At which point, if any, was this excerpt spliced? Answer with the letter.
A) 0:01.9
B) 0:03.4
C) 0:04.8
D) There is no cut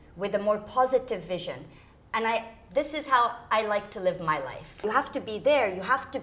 C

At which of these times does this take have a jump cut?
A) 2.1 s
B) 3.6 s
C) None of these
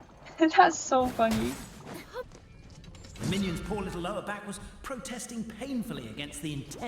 A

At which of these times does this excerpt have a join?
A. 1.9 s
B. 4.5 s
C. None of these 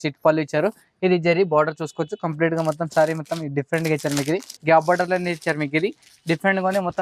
B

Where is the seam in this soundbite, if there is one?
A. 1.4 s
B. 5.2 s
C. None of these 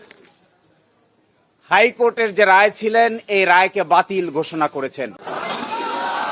B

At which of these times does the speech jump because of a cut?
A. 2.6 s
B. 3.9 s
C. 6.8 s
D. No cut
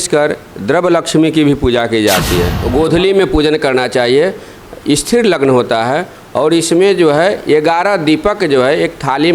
A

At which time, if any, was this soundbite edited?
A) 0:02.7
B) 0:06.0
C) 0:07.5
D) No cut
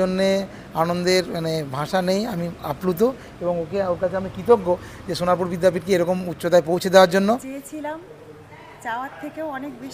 C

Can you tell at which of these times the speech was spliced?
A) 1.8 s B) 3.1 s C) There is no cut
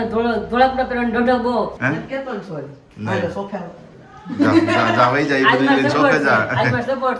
A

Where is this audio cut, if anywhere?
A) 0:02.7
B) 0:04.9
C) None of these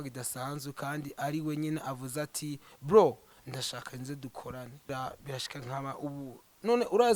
B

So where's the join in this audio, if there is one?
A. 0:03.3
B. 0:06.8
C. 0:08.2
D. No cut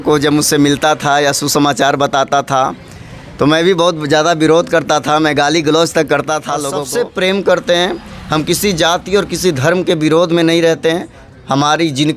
B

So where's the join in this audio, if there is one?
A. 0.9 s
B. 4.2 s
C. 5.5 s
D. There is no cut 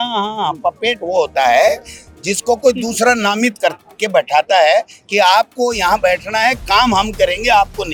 D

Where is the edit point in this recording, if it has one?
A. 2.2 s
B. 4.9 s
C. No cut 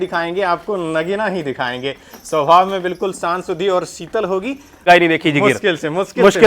B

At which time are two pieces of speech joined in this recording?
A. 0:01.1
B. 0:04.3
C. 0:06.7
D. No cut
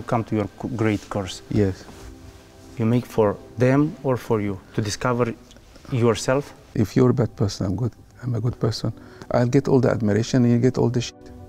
C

